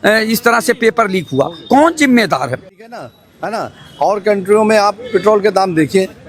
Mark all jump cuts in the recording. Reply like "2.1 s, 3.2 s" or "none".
2.8 s